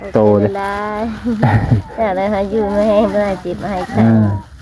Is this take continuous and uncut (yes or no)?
yes